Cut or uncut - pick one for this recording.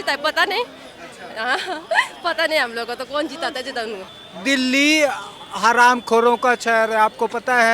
cut